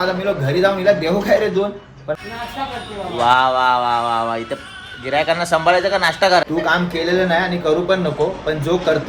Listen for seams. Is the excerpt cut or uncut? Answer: cut